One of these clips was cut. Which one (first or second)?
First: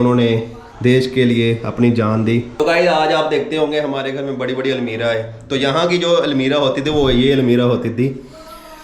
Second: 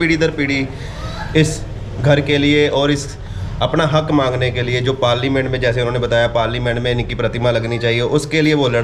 first